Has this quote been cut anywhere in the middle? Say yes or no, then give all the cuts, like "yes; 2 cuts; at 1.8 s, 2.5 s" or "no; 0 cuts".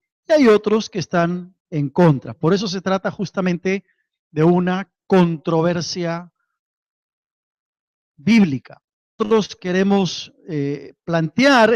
no; 0 cuts